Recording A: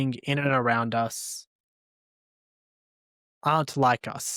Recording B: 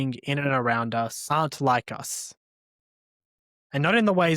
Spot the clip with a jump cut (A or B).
B